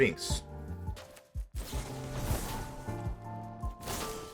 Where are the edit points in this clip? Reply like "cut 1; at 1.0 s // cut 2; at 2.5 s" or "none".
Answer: cut 1; at 1.0 s